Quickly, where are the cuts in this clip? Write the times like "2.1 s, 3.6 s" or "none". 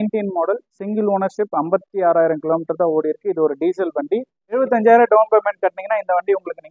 4.6 s